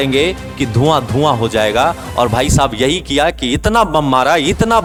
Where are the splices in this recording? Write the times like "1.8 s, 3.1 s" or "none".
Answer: none